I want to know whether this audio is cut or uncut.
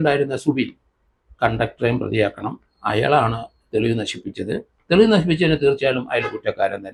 uncut